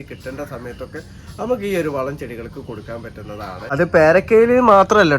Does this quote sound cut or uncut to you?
cut